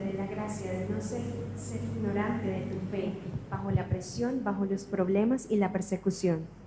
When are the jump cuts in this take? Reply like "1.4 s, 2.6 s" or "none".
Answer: 5.4 s